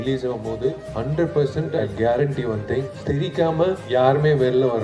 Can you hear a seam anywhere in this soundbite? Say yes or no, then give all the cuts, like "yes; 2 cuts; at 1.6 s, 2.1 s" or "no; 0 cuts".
yes; 4 cuts; at 0.9 s, 1.7 s, 2.9 s, 3.8 s